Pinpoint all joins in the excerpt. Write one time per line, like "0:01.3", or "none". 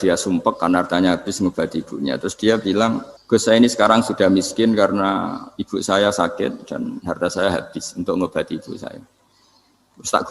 0:03.1